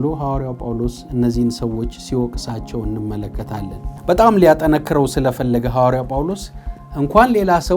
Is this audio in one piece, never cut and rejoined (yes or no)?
no